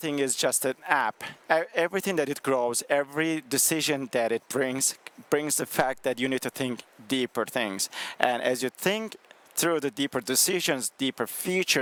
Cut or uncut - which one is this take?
uncut